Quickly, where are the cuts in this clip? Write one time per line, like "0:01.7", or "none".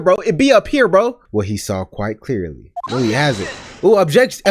0:01.2